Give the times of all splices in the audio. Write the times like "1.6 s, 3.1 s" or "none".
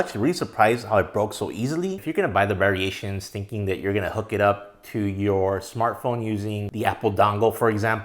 2.0 s